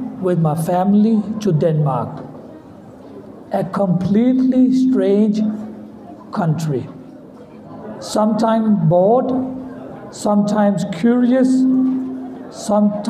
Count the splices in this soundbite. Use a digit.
1